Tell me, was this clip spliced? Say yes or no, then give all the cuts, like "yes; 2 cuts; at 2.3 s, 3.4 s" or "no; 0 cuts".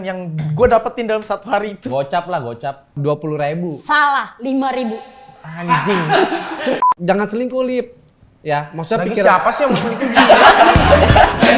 yes; 2 cuts; at 3.0 s, 6.8 s